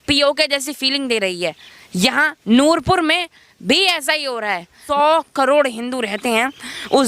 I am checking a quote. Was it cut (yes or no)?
yes